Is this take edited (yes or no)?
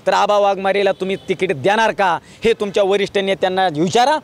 no